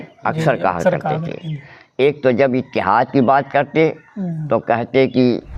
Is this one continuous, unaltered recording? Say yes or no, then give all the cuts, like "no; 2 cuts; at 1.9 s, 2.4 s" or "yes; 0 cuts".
yes; 0 cuts